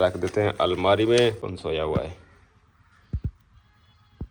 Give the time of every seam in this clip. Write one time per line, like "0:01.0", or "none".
0:01.4